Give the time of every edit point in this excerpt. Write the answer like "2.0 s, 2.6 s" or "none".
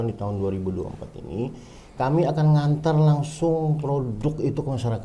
none